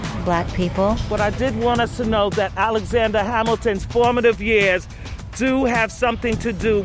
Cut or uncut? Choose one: cut